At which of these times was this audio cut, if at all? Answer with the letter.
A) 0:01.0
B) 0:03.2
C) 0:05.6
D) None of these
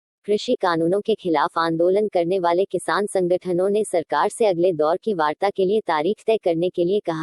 A